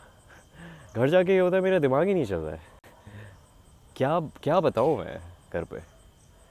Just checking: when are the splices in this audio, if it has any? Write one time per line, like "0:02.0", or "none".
none